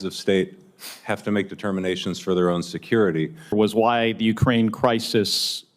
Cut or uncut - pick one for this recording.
cut